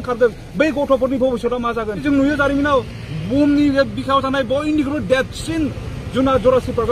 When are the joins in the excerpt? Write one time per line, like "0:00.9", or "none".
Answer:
0:02.0